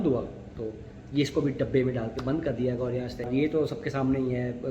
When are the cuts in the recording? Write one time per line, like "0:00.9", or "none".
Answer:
0:03.3

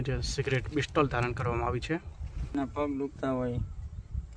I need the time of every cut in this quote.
0:02.5

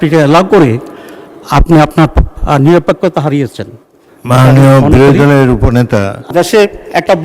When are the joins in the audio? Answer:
0:06.3

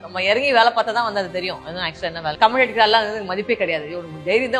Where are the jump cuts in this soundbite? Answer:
0:02.2

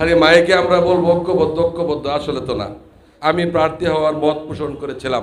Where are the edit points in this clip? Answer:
0:03.1

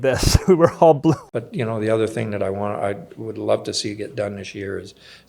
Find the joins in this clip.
0:01.2

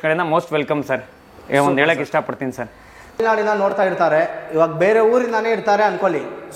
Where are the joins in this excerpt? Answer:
0:03.2

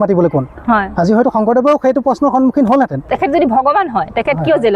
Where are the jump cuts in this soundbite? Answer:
0:03.1

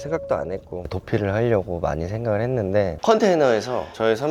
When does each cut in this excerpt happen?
0:00.9
0:02.9

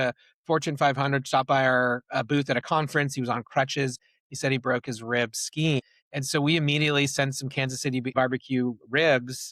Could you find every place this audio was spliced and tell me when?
0:05.8
0:08.1

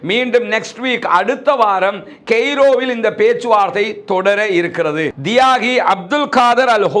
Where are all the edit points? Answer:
0:05.2

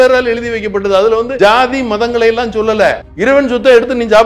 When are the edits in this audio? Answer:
0:01.3
0:03.0

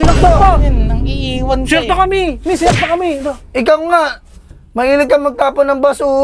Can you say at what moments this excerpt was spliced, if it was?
none

